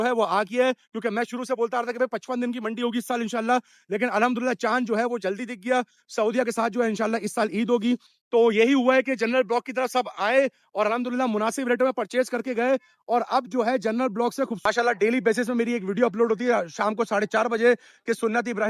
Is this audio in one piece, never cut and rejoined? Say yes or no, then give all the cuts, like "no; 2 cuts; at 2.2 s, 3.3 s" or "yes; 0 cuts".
no; 2 cuts; at 8.1 s, 14.6 s